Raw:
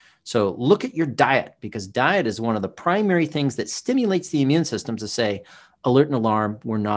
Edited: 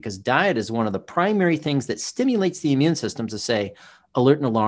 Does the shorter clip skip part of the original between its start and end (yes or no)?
no